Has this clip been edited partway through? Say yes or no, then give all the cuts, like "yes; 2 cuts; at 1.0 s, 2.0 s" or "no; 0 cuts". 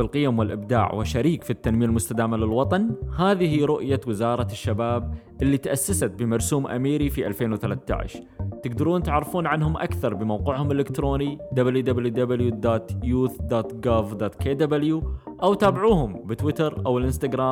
no; 0 cuts